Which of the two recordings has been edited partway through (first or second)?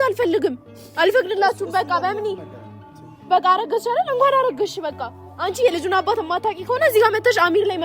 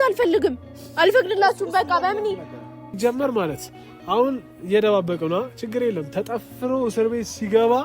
second